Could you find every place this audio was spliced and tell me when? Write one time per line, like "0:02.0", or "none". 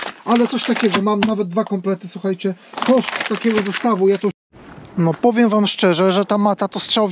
0:04.4